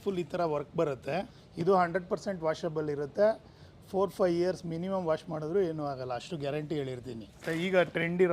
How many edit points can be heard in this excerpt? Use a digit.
2